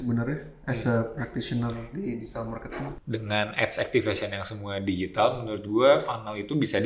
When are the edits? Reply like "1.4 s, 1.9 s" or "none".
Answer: 3.0 s